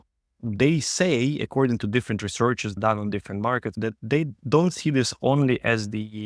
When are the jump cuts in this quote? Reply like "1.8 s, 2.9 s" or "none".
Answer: 2.8 s, 3.7 s